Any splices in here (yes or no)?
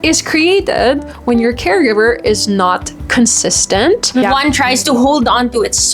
yes